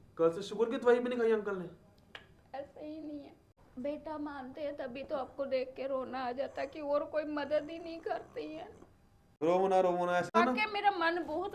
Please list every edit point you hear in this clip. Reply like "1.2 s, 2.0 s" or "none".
3.6 s, 9.4 s, 10.4 s